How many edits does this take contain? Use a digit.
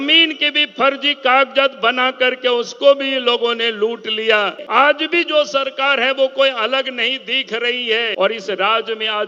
2